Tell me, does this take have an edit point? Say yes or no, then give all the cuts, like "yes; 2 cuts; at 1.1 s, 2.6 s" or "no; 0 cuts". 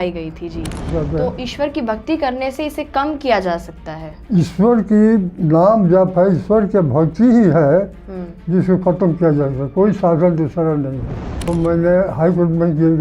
yes; 2 cuts; at 0.9 s, 11.3 s